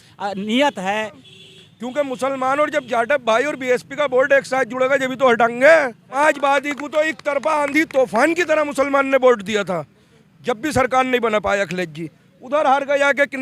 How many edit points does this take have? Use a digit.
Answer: 2